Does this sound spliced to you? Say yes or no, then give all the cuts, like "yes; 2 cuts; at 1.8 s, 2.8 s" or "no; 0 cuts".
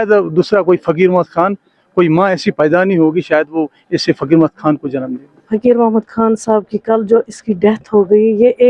yes; 1 cut; at 5.4 s